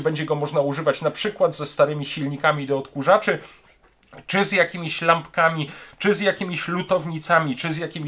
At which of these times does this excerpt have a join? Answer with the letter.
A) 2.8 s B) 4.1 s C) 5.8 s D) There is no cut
D